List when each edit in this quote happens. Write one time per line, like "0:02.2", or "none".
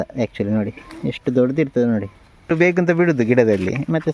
0:02.5